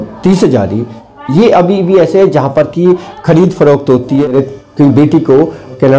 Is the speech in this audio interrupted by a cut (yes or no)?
yes